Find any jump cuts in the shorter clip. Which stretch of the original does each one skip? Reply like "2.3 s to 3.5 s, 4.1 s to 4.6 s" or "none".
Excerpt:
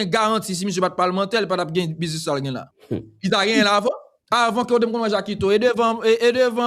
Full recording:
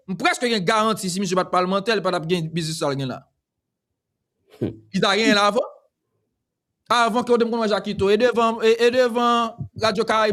3.3 s to 4.4 s, 5.8 s to 6.7 s